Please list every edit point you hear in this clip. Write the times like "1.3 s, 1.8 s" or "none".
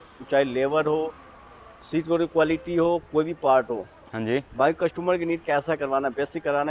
none